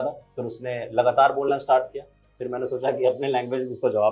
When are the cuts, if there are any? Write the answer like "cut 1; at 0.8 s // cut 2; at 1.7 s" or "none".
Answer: none